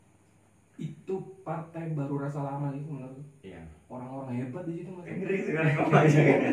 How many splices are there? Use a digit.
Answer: 1